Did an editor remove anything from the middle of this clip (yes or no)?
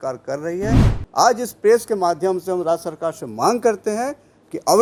no